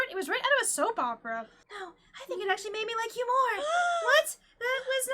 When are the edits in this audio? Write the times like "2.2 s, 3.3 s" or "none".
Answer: 1.5 s